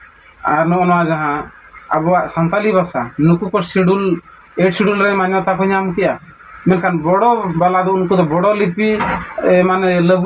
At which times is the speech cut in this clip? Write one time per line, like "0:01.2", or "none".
none